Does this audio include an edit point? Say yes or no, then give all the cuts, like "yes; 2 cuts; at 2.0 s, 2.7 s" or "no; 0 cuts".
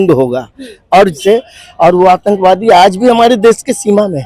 yes; 1 cut; at 1.2 s